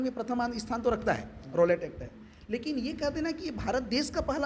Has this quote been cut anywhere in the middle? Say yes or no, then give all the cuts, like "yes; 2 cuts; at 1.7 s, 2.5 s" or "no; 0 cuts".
no; 0 cuts